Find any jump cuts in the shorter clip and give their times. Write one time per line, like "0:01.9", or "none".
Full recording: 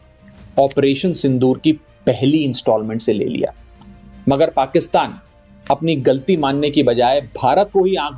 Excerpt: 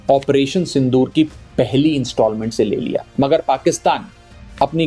0:03.1